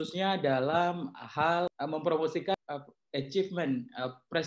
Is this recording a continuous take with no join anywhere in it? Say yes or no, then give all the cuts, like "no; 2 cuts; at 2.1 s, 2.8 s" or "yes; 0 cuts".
no; 2 cuts; at 1.7 s, 2.5 s